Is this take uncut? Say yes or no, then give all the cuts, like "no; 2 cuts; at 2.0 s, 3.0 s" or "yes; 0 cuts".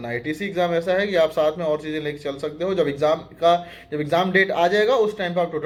yes; 0 cuts